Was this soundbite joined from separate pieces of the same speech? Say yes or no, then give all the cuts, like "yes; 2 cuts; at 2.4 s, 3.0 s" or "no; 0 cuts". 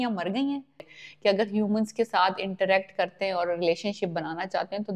yes; 1 cut; at 1.0 s